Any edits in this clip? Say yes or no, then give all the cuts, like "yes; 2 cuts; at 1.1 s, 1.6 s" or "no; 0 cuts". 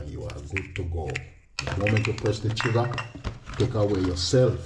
no; 0 cuts